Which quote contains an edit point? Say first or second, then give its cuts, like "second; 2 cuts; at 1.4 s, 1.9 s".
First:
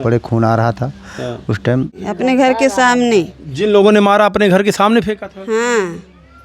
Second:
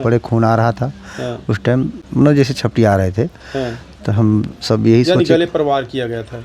first; 1 cut; at 2.0 s